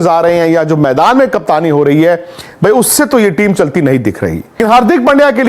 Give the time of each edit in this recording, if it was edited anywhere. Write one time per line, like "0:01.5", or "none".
0:04.6